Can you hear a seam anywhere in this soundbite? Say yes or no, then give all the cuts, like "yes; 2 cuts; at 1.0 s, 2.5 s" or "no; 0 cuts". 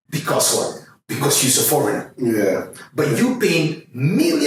no; 0 cuts